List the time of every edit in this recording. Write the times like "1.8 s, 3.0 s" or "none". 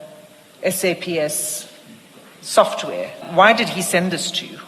3.2 s